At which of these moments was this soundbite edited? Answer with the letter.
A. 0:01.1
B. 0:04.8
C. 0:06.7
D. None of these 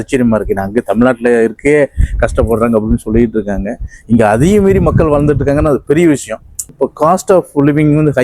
C